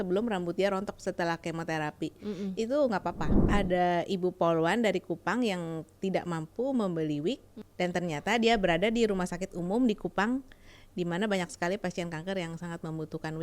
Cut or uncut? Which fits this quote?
cut